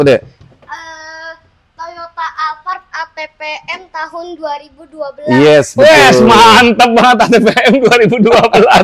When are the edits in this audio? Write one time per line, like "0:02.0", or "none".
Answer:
none